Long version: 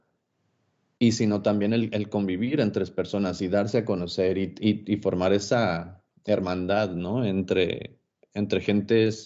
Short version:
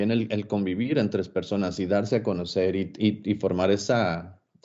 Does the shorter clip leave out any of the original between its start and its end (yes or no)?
no